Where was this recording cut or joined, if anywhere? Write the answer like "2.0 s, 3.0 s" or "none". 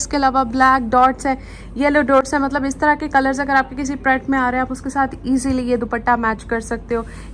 none

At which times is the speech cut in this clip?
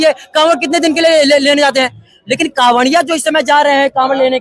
2.1 s

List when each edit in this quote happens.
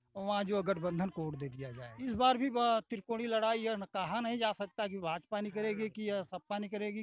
2.0 s

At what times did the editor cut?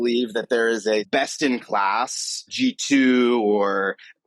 1.1 s, 2.5 s

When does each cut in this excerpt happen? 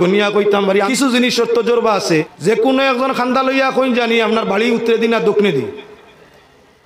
0.9 s, 2.3 s

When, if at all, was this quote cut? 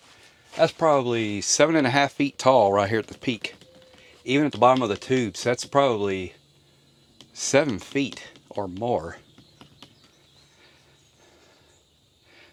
none

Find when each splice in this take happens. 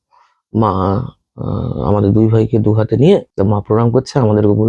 3.3 s

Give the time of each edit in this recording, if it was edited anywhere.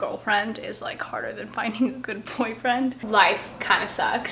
3.0 s

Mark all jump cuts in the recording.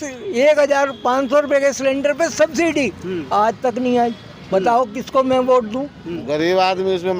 6.2 s

